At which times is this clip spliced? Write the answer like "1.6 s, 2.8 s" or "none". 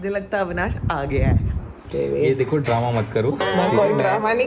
1.9 s